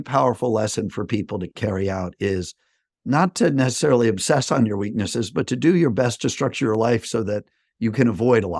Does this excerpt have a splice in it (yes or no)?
no